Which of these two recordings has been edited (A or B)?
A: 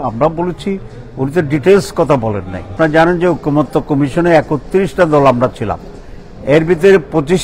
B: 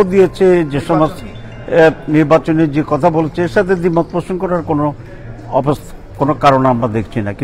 A